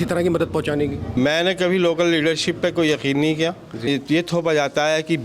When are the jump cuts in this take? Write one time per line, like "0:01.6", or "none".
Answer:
0:01.2
0:03.9